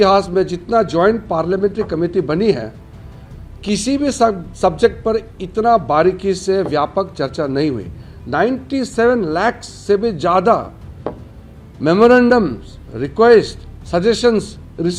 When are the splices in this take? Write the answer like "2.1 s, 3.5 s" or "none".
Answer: none